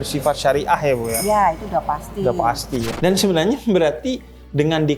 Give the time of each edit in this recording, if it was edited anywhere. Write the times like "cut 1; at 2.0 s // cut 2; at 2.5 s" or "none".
cut 1; at 2.9 s